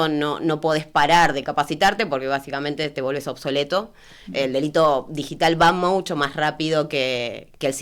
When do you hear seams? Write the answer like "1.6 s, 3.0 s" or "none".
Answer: none